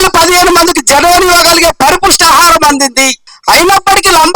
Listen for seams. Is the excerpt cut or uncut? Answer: cut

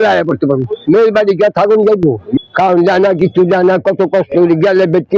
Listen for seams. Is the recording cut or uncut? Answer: cut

